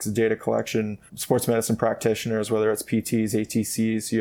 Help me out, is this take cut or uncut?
cut